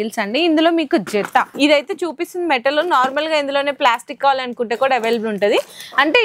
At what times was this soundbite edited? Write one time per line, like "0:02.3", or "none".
0:01.5

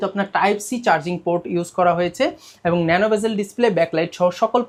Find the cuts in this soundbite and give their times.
none

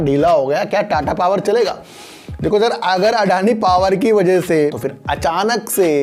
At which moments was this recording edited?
0:04.5

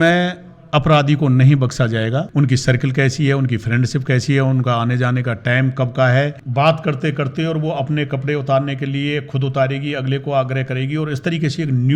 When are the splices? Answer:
0:02.3
0:06.4

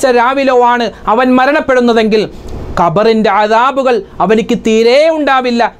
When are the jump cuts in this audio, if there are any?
none

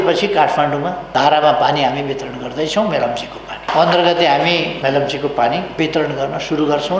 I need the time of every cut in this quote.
0:01.0
0:03.7
0:04.7
0:05.7

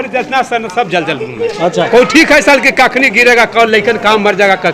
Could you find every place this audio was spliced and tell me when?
none

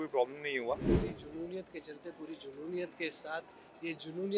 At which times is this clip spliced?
0:01.0

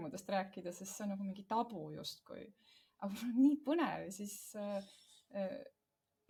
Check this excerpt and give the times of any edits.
none

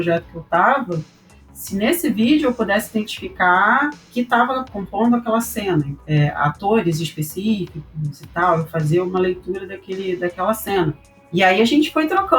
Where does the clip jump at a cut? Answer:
0:04.5
0:06.0
0:11.1

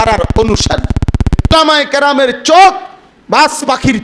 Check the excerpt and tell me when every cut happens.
0:01.5

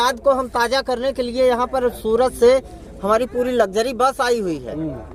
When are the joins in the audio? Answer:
none

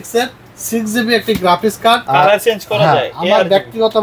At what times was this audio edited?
0:02.0

